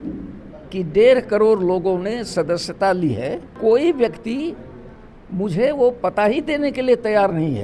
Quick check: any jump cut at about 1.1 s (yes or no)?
no